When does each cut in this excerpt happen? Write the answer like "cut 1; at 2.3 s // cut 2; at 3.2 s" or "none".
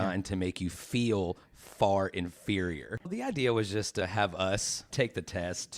cut 1; at 2.8 s // cut 2; at 4.8 s

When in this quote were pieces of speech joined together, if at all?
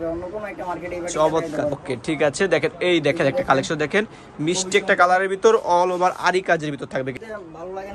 cut 1; at 1.8 s // cut 2; at 7.2 s

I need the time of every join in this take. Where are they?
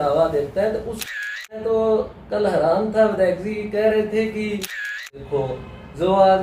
cut 1; at 1.0 s // cut 2; at 5.0 s

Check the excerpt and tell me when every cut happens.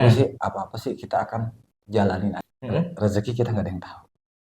cut 1; at 2.5 s

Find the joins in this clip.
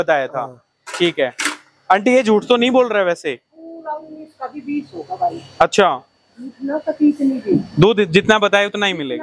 none

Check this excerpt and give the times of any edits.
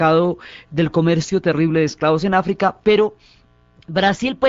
cut 1; at 1.4 s

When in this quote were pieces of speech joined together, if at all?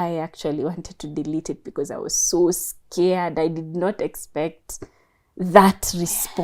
none

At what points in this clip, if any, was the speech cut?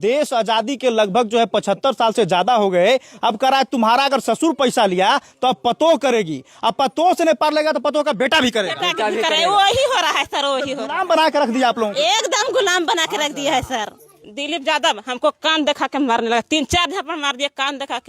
cut 1; at 14.1 s

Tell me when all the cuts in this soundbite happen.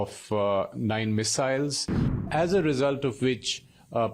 cut 1; at 2.2 s

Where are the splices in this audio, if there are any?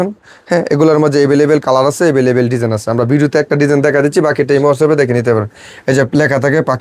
none

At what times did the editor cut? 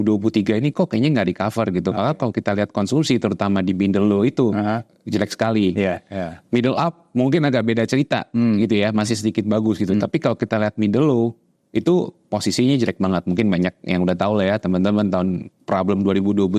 none

